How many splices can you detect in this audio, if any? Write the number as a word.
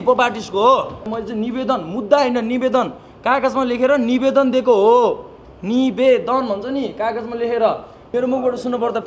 two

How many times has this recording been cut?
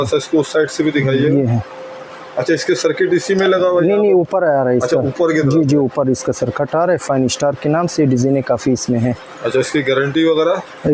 zero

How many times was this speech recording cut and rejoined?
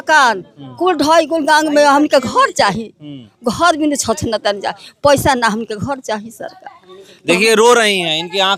zero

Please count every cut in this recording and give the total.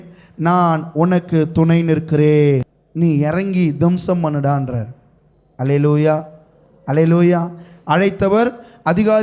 one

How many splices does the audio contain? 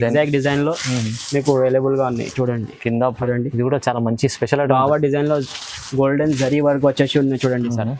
one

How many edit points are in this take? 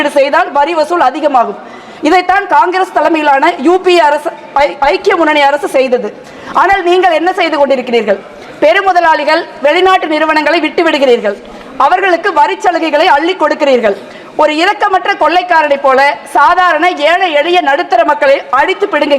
zero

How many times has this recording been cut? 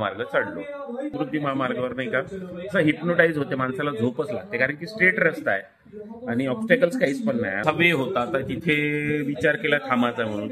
two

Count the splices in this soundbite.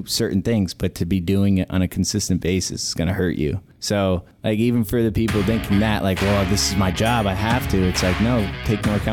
one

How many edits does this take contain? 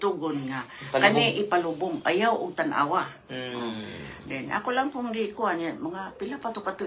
zero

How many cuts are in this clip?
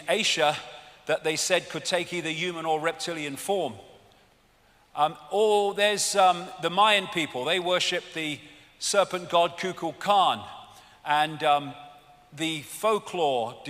one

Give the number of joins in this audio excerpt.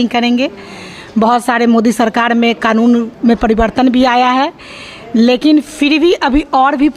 zero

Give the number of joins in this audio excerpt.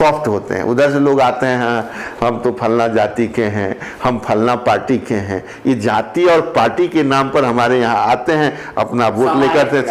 zero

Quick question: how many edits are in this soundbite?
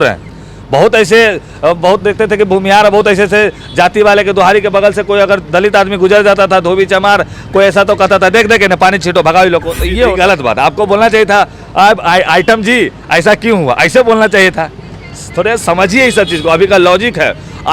one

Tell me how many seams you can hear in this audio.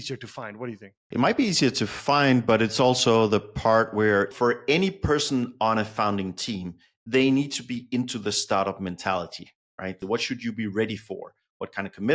two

